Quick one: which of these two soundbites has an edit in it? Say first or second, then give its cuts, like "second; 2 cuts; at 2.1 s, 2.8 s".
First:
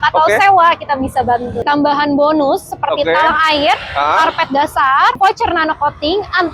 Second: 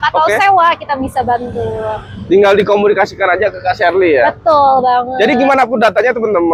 first; 2 cuts; at 1.6 s, 5.2 s